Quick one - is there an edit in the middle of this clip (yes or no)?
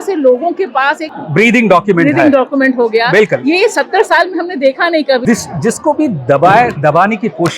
yes